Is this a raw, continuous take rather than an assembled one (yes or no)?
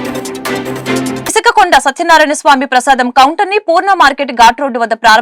no